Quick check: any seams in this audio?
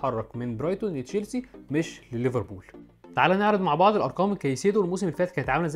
no; 0 cuts

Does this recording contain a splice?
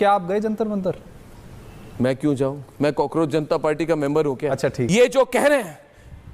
yes; 1 cut; at 4.8 s

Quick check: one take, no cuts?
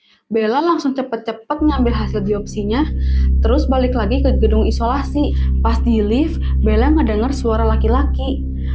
yes; 0 cuts

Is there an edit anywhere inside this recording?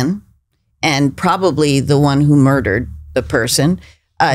no; 0 cuts

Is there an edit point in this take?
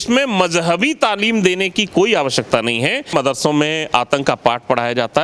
yes; 1 cut; at 3.1 s

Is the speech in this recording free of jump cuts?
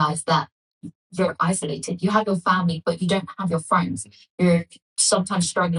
yes; 0 cuts

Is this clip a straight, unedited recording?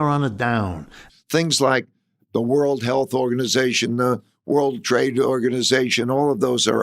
no; 1 cut; at 1.1 s

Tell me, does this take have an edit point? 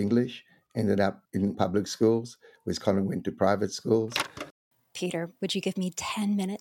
yes; 2 cuts; at 1.5 s, 4.8 s

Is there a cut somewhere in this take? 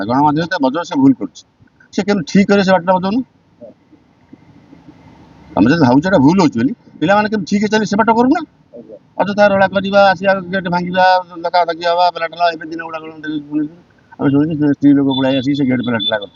no; 0 cuts

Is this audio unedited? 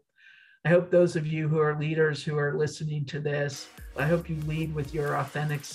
no; 1 cut; at 4.0 s

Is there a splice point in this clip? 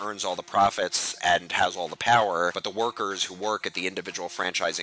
yes; 2 cuts; at 1.2 s, 2.6 s

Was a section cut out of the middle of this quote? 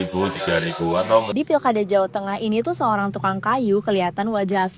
yes; 1 cut; at 1.3 s

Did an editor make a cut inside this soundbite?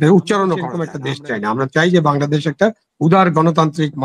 yes; 1 cut; at 1.0 s

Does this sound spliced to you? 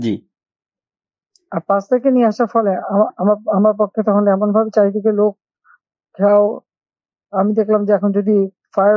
no; 0 cuts

